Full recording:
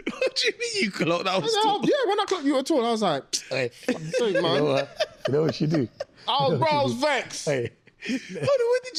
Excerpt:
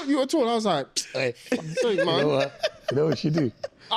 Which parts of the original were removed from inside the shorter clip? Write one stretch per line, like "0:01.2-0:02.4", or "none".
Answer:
none